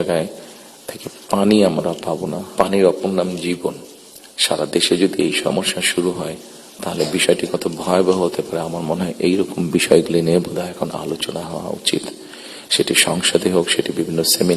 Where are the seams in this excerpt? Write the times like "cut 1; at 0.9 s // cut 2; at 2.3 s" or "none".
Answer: cut 1; at 2.4 s